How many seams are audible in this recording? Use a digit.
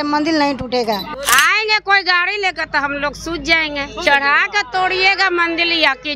1